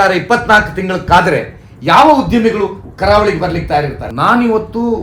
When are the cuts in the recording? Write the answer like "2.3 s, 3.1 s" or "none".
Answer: 4.0 s